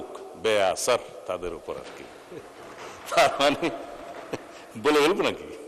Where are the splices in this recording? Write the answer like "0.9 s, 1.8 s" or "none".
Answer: none